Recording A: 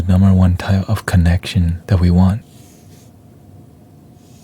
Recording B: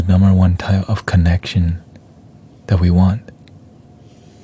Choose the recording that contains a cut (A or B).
A